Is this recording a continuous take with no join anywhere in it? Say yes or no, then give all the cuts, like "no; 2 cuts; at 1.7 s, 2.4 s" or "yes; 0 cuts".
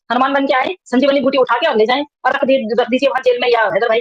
yes; 0 cuts